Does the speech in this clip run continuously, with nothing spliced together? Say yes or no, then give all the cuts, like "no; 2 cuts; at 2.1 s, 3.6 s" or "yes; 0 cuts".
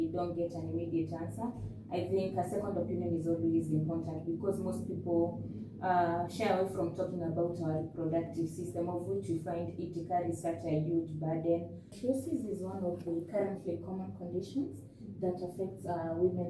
no; 1 cut; at 11.9 s